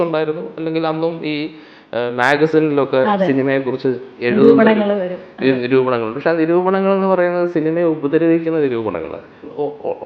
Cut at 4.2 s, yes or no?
no